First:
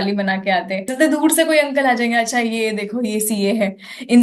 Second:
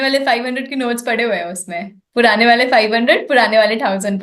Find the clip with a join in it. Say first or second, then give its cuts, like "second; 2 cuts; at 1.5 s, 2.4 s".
first; 1 cut; at 0.9 s